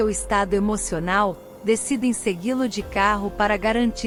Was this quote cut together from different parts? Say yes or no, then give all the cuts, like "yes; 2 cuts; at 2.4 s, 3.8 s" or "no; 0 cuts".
no; 0 cuts